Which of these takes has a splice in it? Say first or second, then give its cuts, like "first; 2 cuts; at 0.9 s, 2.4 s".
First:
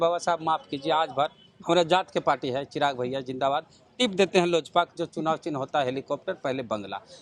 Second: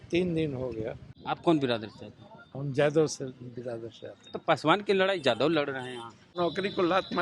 second; 2 cuts; at 1.1 s, 6.3 s